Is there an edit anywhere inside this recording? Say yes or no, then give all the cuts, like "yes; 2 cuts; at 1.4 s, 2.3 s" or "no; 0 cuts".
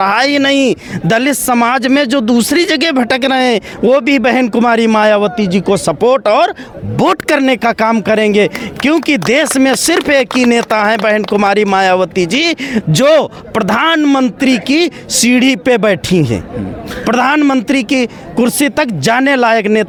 no; 0 cuts